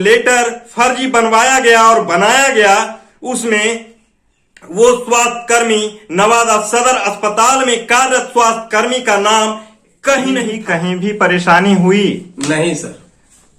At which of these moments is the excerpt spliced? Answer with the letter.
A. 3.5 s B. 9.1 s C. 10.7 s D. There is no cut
C